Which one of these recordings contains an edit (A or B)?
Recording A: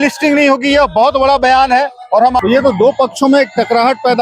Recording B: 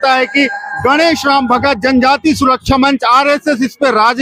A